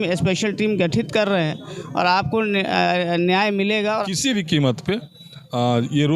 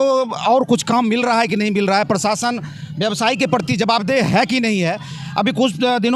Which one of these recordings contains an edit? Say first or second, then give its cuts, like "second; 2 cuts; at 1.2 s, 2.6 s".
first; 1 cut; at 4.0 s